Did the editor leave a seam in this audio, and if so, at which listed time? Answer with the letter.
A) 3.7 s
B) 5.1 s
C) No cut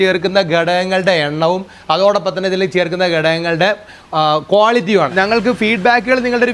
B